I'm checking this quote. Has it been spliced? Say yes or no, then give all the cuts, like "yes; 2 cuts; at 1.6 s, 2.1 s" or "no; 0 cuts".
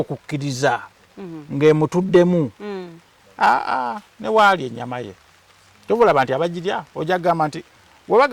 no; 0 cuts